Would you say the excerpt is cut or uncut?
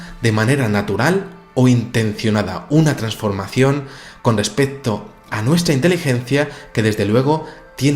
cut